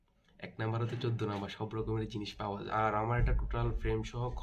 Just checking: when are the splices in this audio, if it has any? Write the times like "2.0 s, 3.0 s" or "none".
2.7 s